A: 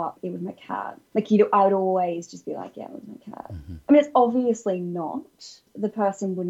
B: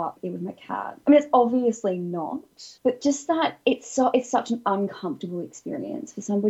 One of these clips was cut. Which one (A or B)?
B